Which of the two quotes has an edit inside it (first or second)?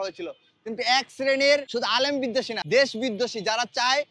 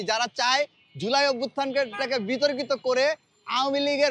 first